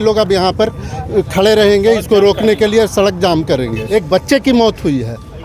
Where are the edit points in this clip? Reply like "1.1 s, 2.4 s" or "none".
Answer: 3.8 s